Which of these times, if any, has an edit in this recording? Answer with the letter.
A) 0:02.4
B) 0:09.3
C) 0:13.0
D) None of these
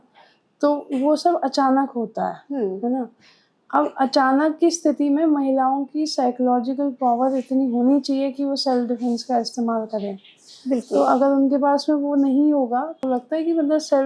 C